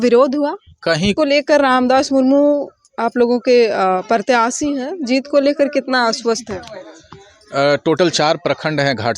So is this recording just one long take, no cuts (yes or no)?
no